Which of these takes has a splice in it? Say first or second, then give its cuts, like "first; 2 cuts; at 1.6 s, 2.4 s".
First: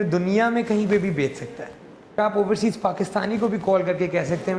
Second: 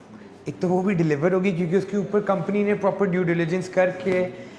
first; 1 cut; at 2.2 s